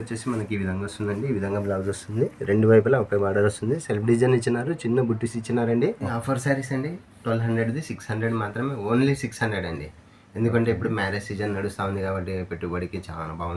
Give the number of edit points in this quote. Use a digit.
1